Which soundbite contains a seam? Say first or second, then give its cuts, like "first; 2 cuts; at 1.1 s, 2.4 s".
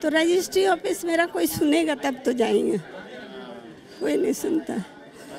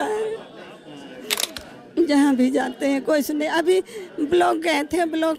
second; 1 cut; at 1.5 s